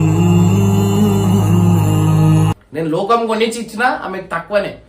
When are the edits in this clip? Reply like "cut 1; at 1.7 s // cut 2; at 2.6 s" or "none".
cut 1; at 2.5 s

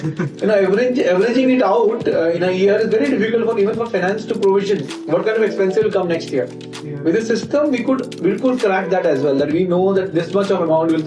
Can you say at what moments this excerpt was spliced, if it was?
none

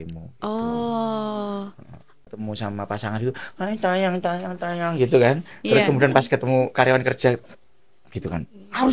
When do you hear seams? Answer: cut 1; at 2.2 s

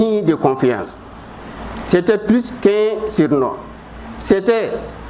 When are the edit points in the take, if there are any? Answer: none

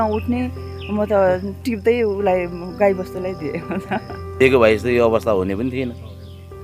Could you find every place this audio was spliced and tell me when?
cut 1; at 4.4 s

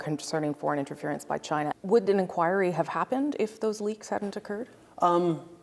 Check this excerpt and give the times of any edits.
cut 1; at 1.7 s

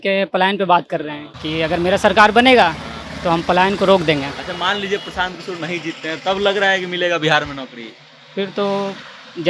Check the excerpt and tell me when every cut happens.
none

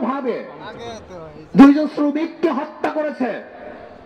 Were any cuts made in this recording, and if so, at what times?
none

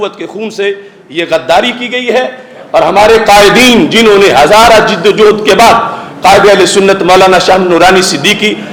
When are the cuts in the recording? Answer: none

